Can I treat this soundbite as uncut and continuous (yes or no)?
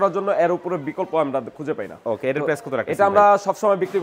yes